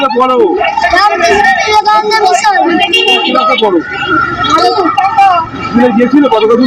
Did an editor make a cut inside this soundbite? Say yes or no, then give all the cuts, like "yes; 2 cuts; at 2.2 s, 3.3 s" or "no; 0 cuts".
no; 0 cuts